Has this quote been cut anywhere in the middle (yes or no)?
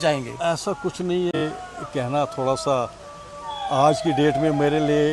yes